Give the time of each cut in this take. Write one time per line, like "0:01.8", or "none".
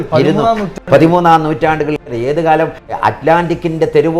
0:02.1
0:03.0